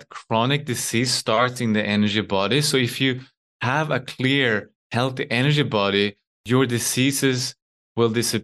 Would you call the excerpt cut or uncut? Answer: cut